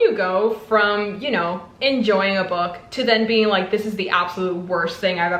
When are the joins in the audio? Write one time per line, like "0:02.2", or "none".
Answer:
none